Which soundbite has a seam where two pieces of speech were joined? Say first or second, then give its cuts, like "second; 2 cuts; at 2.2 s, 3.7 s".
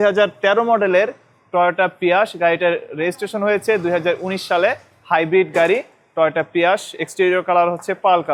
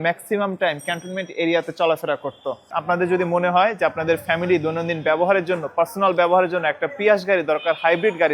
second; 1 cut; at 2.7 s